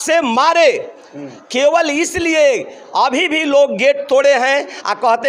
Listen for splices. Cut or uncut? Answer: uncut